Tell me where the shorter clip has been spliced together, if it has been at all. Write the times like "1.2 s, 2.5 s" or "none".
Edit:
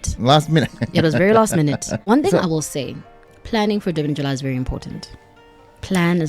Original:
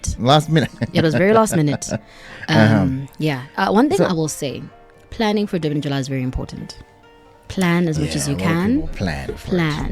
2.0 s